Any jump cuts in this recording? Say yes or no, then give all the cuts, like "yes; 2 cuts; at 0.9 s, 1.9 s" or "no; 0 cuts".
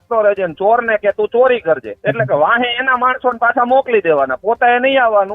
yes; 1 cut; at 1.9 s